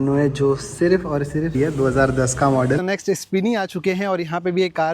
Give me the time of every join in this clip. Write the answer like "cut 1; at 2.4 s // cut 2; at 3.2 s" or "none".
cut 1; at 1.6 s // cut 2; at 2.8 s